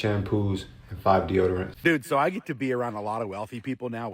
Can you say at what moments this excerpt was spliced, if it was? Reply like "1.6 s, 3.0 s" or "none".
1.7 s

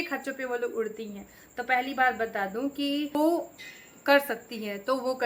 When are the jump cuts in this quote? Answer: 3.1 s

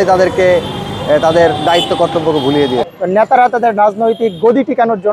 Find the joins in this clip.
2.9 s

